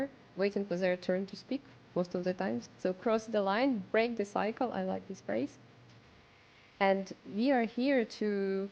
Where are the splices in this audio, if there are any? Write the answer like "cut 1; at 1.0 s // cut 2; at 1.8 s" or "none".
cut 1; at 2.7 s // cut 2; at 6.1 s